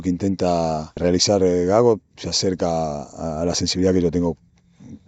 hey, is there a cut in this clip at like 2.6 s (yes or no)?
no